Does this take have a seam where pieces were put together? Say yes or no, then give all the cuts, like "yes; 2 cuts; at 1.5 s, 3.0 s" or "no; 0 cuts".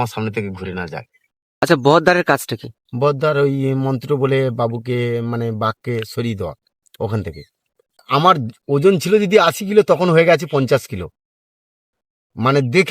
yes; 2 cuts; at 1.6 s, 8.0 s